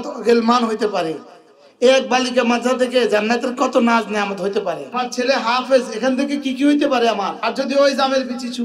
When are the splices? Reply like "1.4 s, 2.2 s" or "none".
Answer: 4.9 s, 7.4 s